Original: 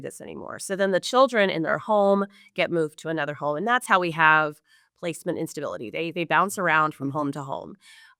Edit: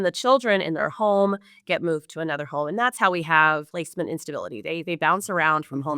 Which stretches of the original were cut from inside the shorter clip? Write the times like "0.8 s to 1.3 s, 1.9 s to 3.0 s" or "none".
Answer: 4.6 s to 5.0 s